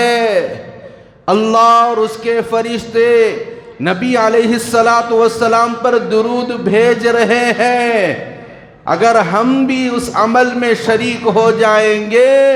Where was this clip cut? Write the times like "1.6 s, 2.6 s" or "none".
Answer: none